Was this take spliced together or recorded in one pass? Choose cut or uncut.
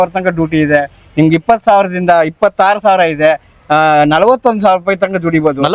uncut